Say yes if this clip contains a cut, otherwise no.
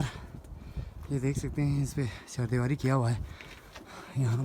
no